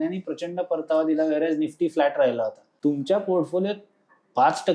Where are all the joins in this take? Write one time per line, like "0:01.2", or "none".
0:02.6